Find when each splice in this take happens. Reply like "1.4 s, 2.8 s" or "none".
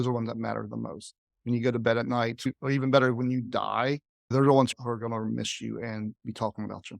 2.5 s, 4.7 s